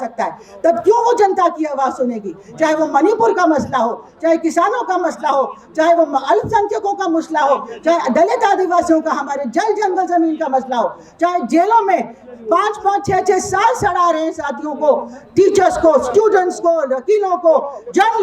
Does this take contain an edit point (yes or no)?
no